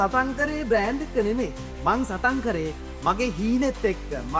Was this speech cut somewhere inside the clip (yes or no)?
no